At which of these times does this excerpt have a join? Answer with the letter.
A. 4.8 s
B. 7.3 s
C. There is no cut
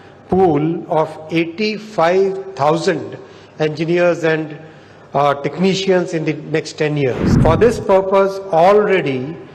B